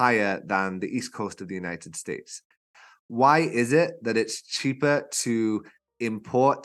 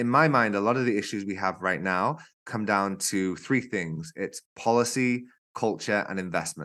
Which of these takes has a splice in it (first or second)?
first